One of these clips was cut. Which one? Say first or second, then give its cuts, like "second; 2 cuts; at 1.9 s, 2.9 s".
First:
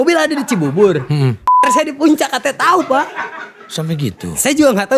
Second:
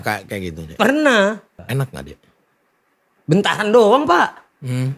second; 1 cut; at 1.6 s